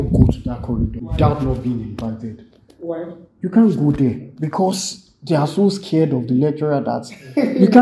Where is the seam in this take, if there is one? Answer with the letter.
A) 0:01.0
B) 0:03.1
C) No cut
A